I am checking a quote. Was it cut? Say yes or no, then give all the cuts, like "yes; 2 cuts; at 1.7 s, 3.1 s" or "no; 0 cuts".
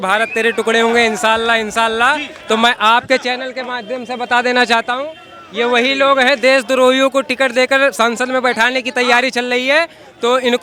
no; 0 cuts